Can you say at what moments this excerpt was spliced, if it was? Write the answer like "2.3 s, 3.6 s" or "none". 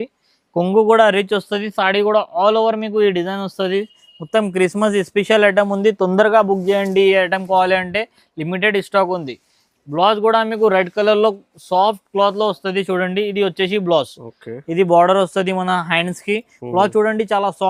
none